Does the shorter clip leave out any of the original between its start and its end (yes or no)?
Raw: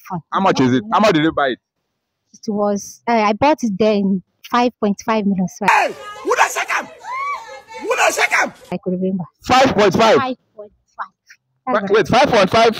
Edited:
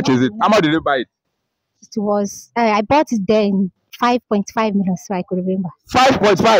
yes